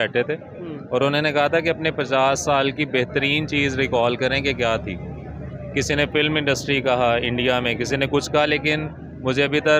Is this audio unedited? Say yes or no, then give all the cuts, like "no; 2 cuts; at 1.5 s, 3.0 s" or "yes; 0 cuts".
yes; 0 cuts